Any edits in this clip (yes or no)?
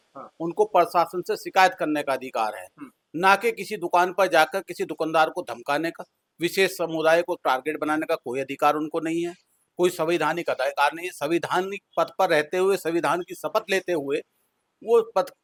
no